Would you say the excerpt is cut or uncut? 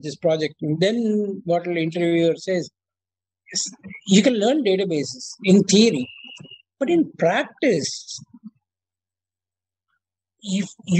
cut